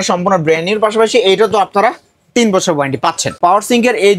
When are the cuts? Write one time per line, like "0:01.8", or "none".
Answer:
0:03.3